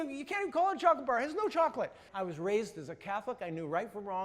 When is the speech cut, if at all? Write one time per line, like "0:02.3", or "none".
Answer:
0:02.1